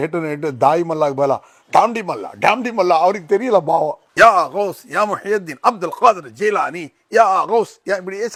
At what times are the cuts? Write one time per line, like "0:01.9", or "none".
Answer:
none